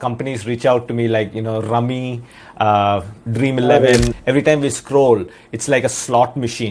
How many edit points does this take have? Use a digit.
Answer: 1